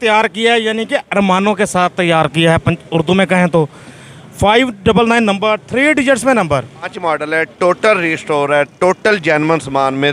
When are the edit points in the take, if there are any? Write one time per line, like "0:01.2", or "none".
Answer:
0:06.9